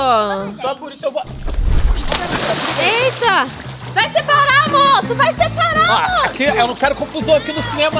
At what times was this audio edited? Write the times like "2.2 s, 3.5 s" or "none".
none